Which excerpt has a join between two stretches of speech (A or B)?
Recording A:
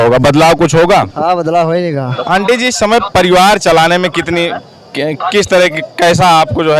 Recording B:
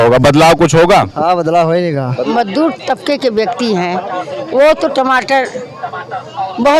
B